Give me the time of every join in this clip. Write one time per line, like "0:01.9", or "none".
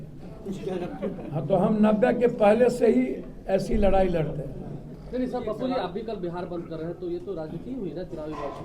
0:04.9